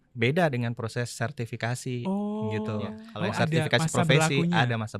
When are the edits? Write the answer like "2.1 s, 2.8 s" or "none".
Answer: 3.0 s

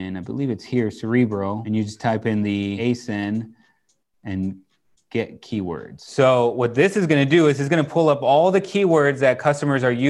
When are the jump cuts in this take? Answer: 1.6 s, 2.8 s, 6.0 s

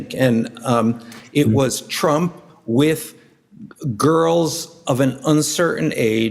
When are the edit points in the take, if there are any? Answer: 1.2 s, 2.5 s

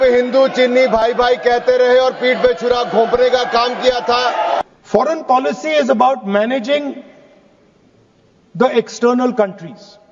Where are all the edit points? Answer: 4.6 s

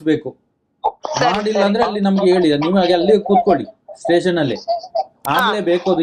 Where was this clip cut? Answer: none

